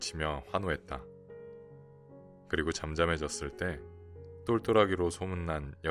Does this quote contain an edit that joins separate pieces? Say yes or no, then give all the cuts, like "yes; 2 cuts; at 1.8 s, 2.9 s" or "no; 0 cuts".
no; 0 cuts